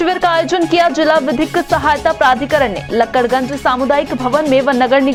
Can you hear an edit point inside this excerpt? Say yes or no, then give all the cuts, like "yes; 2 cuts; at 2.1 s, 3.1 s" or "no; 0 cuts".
no; 0 cuts